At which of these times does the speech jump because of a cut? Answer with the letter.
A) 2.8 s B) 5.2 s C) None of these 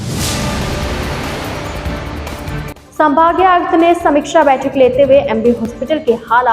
A